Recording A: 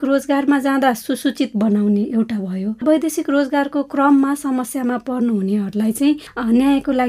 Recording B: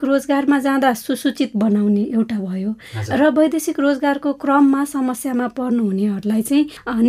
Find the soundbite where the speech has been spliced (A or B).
A